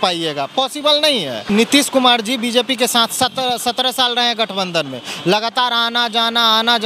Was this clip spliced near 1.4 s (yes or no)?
yes